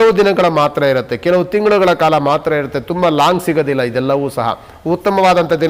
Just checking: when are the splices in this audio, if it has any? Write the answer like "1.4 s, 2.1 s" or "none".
none

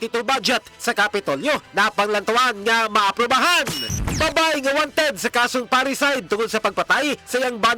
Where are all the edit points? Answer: 3.9 s

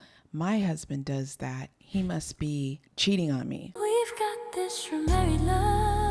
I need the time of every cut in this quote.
2.9 s, 3.7 s

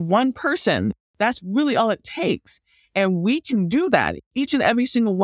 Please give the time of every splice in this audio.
1.0 s, 4.2 s

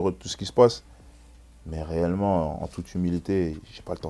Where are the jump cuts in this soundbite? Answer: none

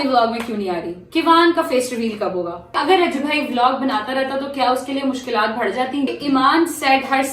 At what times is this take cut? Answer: 2.8 s, 6.1 s

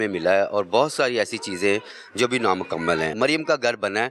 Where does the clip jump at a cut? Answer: 3.1 s

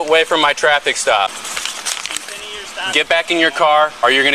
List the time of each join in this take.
1.3 s

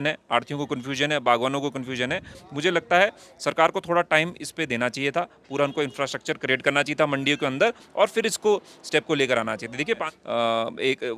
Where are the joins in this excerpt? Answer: 10.1 s

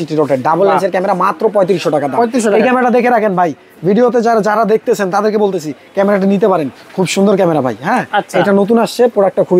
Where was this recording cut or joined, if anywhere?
none

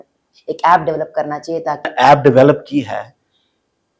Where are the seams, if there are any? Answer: 1.9 s

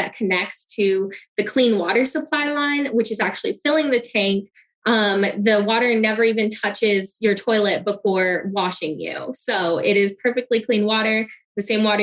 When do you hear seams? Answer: none

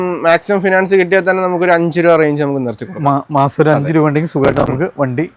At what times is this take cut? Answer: none

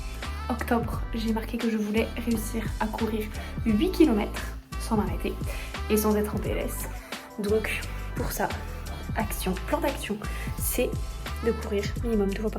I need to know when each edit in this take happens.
none

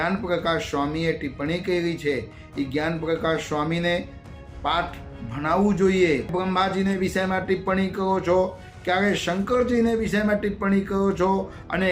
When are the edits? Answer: 6.3 s

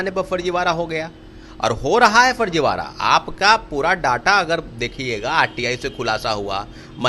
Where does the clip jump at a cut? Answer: none

